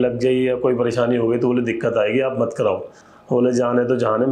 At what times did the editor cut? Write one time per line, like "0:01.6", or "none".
none

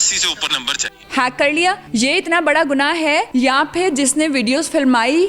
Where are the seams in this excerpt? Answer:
0:01.0
0:01.8
0:03.3

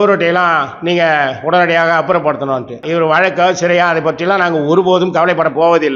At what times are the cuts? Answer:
0:02.8

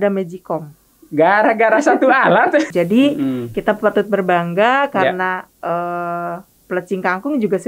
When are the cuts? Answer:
0:02.7

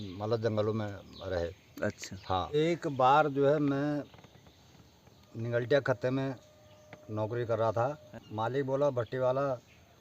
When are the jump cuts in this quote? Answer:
0:02.5
0:08.0

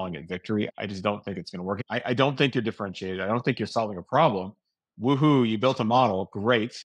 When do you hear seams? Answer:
0:01.8

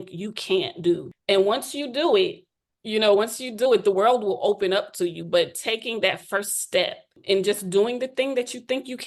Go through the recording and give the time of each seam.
0:01.1
0:07.1

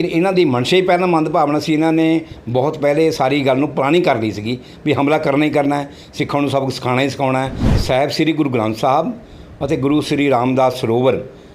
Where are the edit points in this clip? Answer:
0:07.6

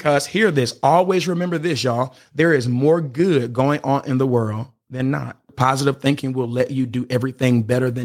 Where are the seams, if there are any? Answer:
0:02.2
0:05.5

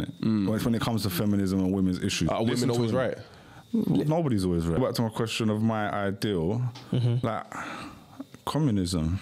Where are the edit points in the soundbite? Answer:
0:04.8

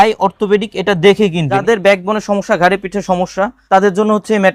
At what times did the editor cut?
0:01.6
0:03.6

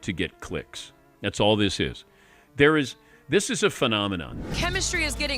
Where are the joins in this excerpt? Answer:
0:04.3

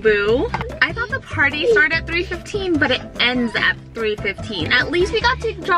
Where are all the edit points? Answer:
0:04.7

